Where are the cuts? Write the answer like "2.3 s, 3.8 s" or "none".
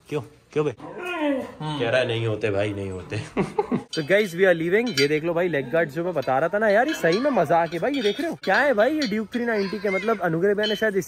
none